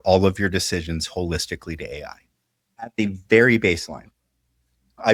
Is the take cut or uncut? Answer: uncut